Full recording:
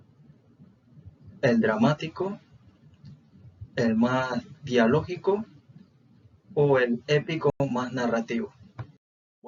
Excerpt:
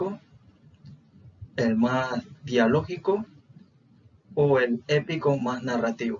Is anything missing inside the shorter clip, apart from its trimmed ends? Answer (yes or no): yes